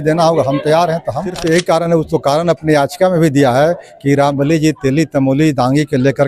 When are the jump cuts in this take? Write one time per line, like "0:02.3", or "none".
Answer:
0:01.4